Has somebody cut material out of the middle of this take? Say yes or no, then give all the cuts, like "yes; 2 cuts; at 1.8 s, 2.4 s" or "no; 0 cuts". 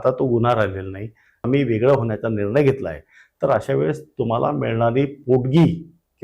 yes; 1 cut; at 1.4 s